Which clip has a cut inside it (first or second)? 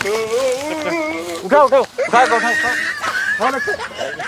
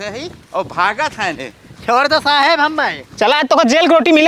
first